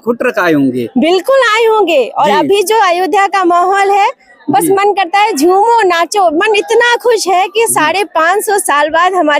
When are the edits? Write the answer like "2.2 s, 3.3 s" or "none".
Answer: none